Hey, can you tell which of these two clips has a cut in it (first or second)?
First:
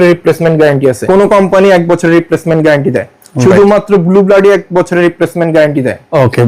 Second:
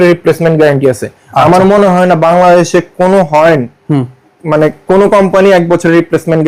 first